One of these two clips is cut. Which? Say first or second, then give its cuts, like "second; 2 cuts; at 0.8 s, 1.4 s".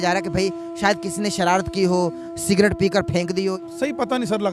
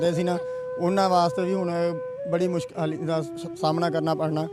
first; 1 cut; at 3.5 s